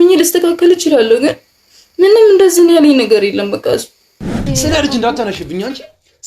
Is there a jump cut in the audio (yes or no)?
yes